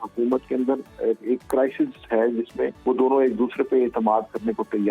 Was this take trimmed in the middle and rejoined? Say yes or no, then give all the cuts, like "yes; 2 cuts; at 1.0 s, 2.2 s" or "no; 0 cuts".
yes; 1 cut; at 2.8 s